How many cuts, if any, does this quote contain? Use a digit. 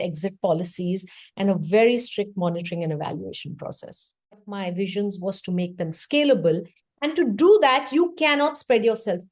1